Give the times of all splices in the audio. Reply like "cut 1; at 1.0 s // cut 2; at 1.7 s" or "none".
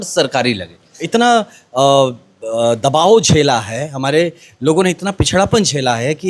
cut 1; at 0.9 s